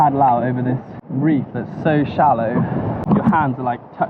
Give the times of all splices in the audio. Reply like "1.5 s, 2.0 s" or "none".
1.0 s, 3.0 s